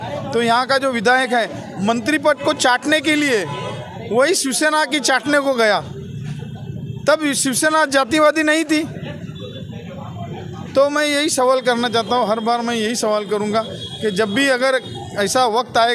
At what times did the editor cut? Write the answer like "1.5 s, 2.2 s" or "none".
none

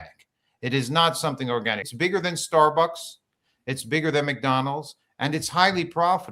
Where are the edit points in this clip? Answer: 1.9 s

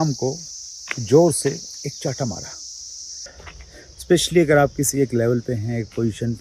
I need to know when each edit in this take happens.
3.2 s

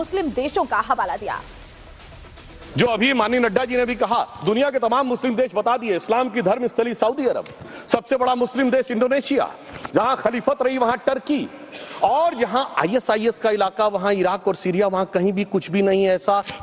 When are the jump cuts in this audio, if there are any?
6.7 s

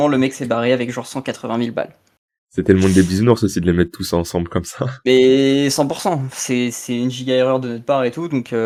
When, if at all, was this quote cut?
none

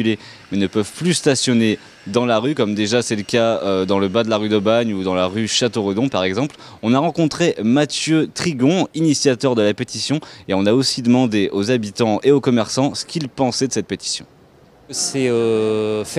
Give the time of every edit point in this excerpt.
2.8 s

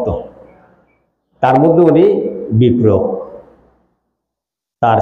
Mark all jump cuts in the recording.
none

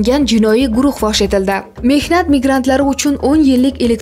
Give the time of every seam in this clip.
1.7 s

